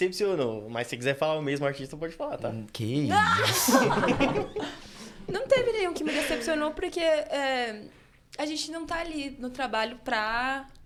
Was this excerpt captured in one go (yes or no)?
yes